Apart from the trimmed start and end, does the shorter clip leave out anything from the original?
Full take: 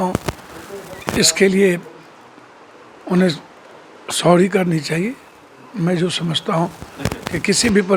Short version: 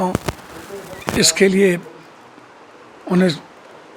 no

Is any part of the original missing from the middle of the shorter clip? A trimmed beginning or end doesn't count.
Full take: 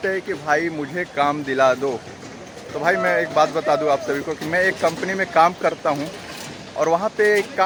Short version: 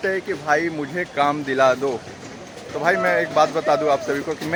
no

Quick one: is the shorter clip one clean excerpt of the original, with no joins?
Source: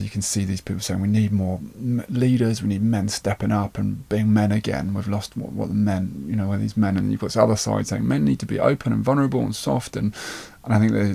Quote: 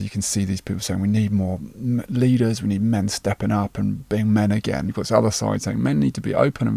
no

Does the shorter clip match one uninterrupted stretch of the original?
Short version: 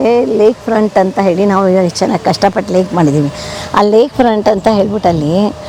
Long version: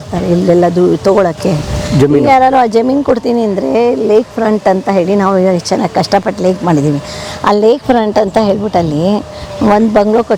yes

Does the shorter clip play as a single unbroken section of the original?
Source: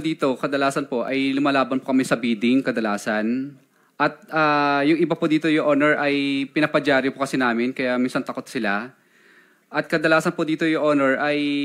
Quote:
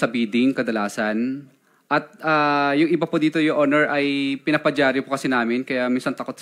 yes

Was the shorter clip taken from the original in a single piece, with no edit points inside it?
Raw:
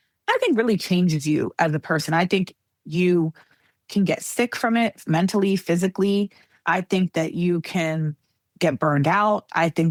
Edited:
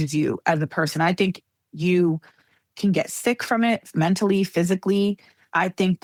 yes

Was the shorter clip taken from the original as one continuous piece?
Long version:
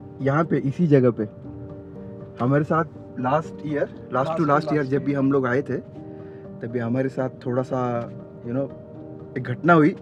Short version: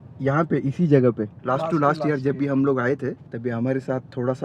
no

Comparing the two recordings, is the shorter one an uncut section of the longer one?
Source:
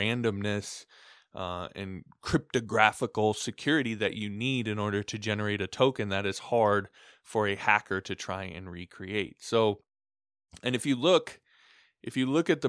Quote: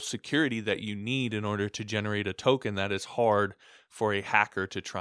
yes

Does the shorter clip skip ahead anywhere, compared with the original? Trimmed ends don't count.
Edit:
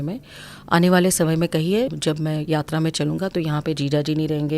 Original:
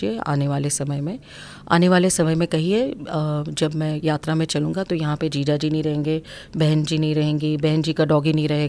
yes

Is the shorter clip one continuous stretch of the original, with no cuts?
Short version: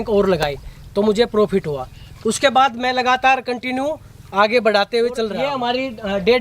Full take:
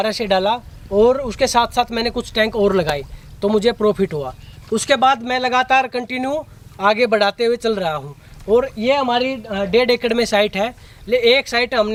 no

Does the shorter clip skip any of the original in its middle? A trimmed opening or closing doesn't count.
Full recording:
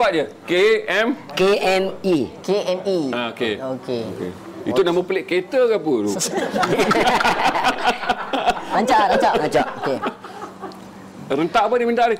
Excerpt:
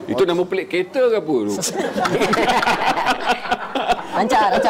no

